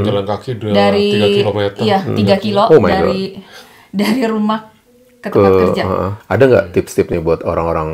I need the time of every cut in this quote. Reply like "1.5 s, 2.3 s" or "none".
6.2 s